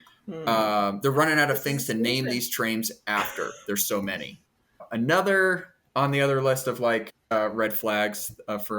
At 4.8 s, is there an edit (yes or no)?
yes